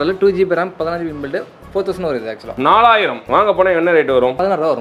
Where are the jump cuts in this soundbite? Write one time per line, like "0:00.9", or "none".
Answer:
0:03.3